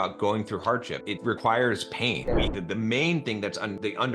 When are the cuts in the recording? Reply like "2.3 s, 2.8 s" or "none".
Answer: 2.5 s

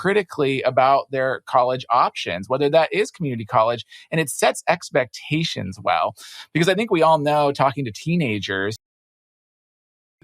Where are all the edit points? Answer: none

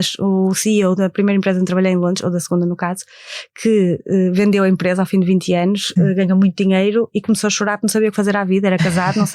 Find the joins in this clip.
1.0 s

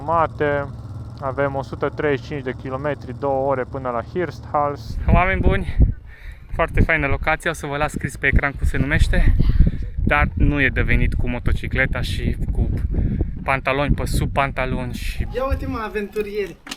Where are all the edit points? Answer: 4.9 s, 15.2 s

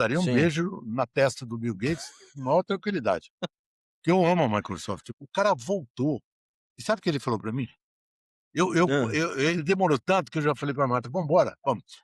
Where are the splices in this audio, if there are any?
5.0 s

